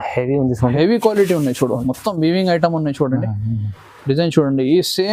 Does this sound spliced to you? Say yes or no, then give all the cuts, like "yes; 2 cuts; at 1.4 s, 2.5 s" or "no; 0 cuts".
no; 0 cuts